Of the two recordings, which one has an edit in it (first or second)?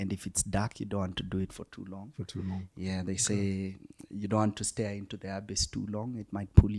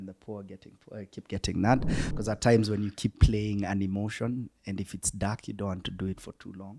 second